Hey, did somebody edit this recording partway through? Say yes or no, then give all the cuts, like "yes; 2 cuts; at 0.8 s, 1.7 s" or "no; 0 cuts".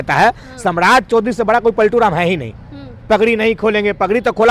no; 0 cuts